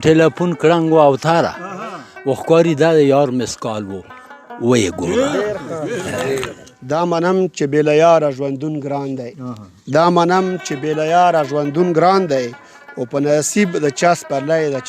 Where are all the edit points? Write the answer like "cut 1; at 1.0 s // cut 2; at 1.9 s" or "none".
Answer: cut 1; at 6.7 s